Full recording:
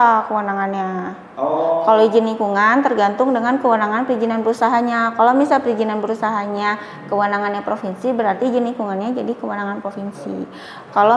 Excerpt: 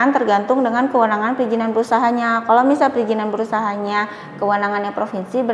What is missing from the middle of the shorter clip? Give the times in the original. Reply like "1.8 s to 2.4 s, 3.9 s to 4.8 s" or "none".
none